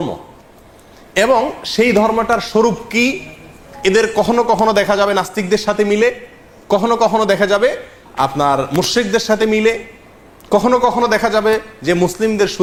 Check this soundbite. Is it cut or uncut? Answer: uncut